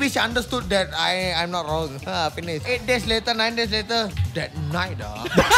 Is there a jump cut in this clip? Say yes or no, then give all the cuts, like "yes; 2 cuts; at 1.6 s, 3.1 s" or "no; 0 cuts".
yes; 2 cuts; at 2.6 s, 4.2 s